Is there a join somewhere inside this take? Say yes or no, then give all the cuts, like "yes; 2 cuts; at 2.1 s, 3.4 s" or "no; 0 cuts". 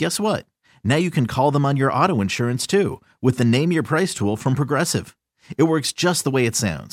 no; 0 cuts